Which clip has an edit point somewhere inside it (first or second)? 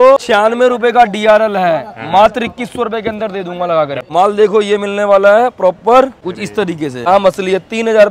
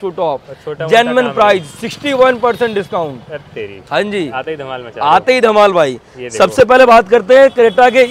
first